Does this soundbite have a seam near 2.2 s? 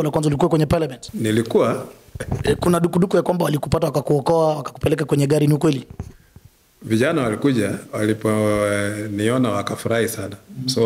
yes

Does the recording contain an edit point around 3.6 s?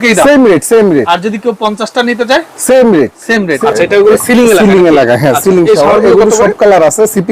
yes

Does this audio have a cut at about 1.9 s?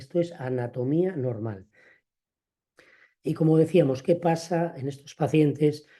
yes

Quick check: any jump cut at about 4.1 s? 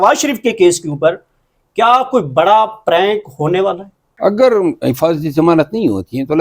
yes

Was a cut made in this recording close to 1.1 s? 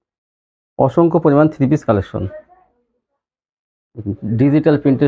no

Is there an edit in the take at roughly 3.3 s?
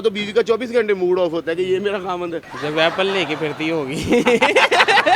no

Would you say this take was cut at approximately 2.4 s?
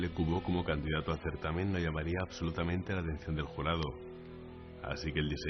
no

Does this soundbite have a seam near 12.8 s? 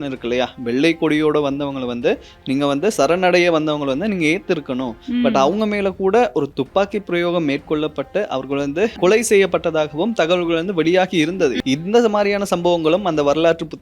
no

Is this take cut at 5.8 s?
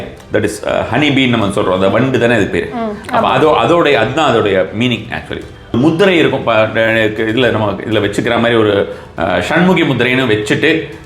yes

